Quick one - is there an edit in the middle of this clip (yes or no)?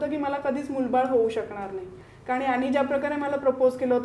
yes